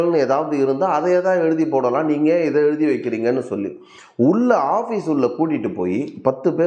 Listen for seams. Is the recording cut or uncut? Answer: uncut